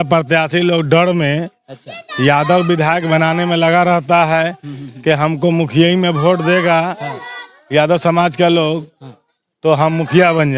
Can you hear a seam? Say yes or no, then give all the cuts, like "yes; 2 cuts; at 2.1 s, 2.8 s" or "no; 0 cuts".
no; 0 cuts